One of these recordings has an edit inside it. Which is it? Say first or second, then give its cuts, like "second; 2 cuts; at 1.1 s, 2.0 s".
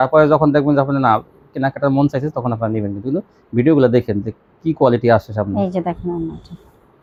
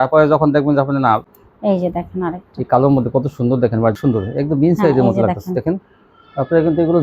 second; 2 cuts; at 1.4 s, 4.0 s